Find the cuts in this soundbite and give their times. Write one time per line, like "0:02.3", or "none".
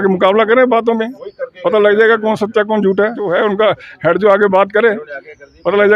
0:03.3